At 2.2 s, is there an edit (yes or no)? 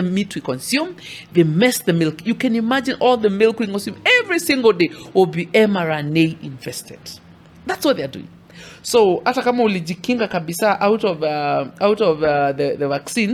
no